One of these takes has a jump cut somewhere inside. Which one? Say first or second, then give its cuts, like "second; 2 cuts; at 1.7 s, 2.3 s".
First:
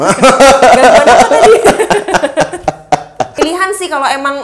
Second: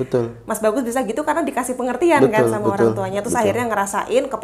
first; 1 cut; at 3.3 s